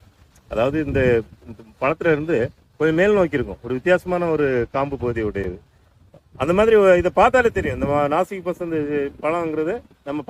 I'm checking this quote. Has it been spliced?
no; 0 cuts

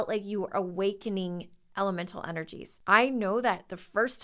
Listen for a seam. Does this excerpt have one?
yes; 1 cut; at 2.7 s

